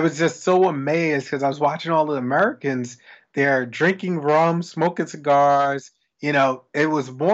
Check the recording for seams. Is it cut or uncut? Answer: uncut